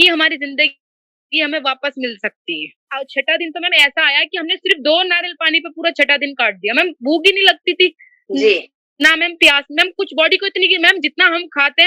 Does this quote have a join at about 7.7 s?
no; 1 cut; at 2.8 s

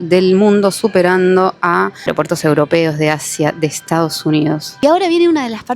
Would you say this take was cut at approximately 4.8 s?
yes; 2 cuts; at 2.0 s, 4.8 s

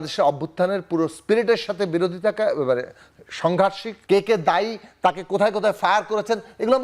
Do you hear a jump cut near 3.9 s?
yes; 1 cut; at 3.9 s

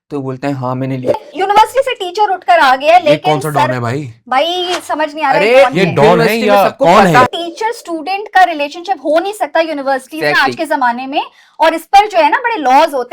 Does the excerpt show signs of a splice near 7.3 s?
yes; 2 cuts; at 1.2 s, 7.3 s

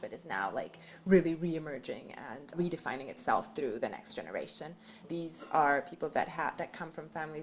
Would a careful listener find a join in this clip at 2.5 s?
yes; 2 cuts; at 2.5 s, 5.0 s

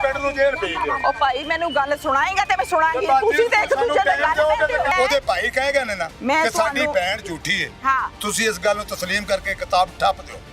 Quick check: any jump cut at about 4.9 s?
yes; 2 cuts; at 4.9 s, 6.1 s

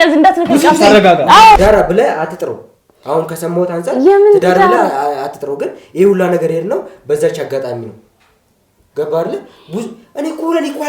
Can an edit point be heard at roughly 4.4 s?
no; 1 cut; at 1.6 s

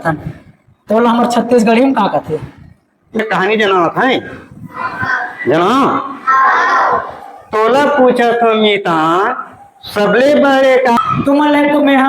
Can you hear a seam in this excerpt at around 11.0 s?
yes; 2 cuts; at 3.2 s, 11.0 s

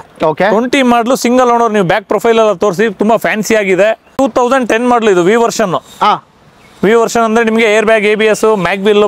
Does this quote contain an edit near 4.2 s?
yes; 1 cut; at 4.2 s

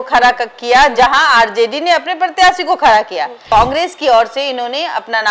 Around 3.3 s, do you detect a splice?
yes; 1 cut; at 3.3 s

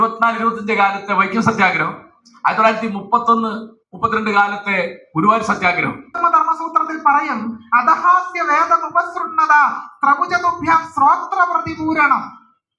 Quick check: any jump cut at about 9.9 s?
no; 1 cut; at 6.2 s

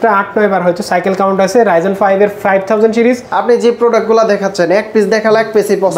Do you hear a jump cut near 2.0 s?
no; 1 cut; at 3.3 s

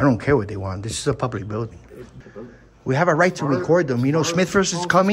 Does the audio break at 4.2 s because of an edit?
no; 1 cut; at 2.1 s

